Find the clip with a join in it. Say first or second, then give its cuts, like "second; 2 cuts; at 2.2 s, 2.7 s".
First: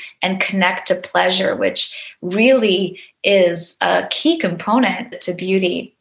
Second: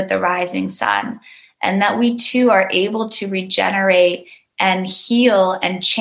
first; 1 cut; at 5.1 s